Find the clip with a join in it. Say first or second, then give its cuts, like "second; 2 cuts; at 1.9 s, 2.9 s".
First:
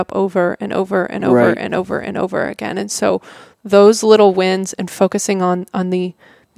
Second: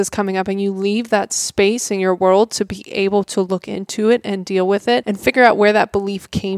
second; 1 cut; at 5.1 s